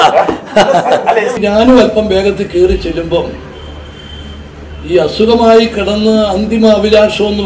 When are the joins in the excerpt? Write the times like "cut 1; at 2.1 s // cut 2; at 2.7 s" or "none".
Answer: cut 1; at 1.4 s